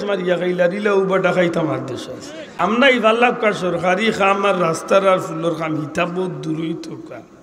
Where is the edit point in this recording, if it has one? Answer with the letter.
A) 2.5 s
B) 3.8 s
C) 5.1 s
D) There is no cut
A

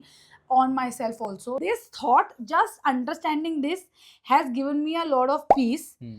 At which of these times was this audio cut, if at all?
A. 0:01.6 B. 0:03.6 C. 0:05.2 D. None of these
A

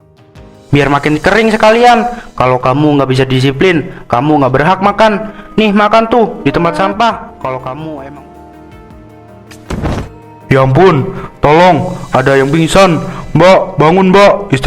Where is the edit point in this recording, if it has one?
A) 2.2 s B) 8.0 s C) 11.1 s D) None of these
B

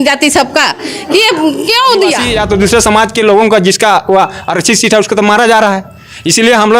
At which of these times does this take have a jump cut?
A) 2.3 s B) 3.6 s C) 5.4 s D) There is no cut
A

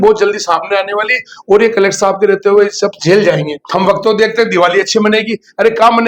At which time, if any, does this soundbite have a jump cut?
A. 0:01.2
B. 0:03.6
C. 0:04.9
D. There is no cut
B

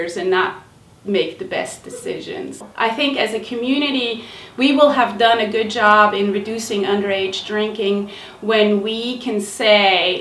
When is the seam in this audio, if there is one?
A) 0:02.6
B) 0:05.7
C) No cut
A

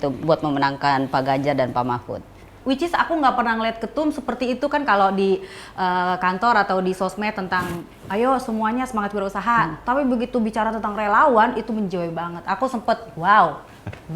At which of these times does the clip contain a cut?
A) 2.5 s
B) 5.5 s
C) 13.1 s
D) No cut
A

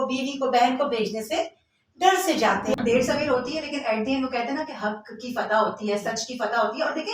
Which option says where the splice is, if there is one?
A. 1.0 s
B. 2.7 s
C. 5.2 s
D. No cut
B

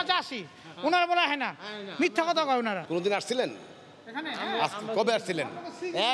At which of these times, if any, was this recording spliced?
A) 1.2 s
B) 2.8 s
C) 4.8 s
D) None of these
B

